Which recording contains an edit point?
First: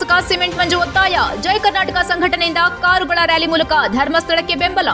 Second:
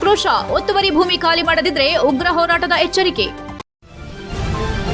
second; 1 cut; at 3.5 s

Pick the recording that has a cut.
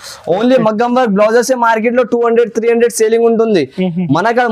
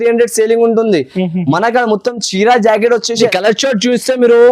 second; 1 cut; at 3.3 s

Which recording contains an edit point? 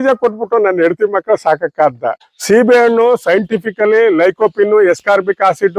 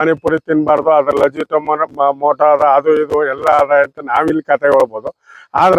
first; 1 cut; at 2.2 s

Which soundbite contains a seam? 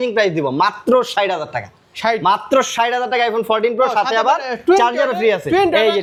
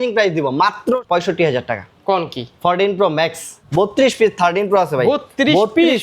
second; 2 cuts; at 1.0 s, 3.6 s

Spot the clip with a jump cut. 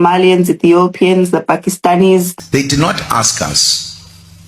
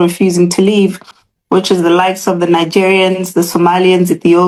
first; 1 cut; at 2.3 s

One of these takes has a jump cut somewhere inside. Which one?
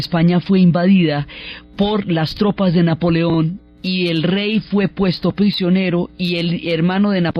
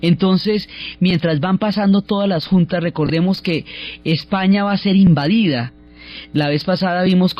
second; 1 cut; at 3.8 s

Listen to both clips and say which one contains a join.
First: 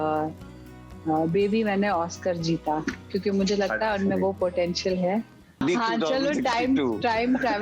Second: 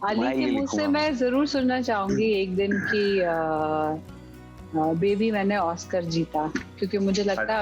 first; 1 cut; at 5.6 s

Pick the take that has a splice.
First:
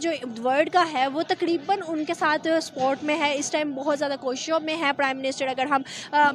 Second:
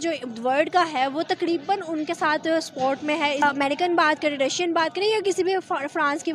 second; 1 cut; at 3.4 s

